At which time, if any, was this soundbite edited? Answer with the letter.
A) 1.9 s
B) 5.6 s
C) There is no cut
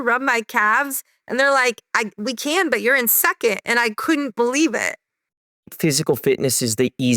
B